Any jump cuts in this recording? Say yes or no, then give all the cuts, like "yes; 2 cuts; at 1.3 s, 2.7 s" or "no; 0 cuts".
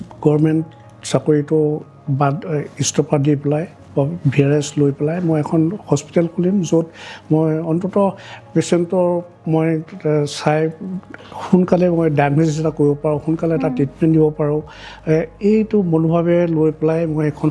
no; 0 cuts